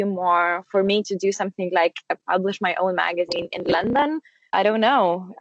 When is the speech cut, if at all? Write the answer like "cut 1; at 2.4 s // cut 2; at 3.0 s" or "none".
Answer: cut 1; at 4.4 s